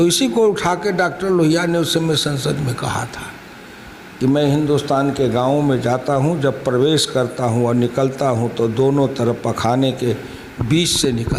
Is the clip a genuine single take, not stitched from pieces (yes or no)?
yes